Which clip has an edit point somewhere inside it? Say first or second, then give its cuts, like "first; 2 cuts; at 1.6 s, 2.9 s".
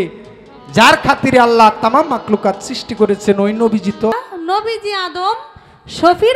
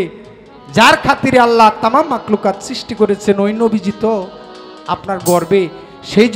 first; 1 cut; at 4.1 s